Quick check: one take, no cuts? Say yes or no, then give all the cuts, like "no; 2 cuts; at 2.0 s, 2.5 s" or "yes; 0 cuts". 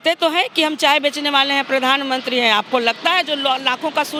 yes; 0 cuts